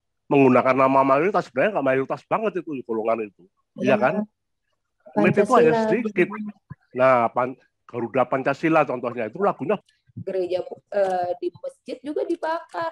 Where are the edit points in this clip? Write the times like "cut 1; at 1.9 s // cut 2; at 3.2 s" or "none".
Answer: cut 1; at 9.8 s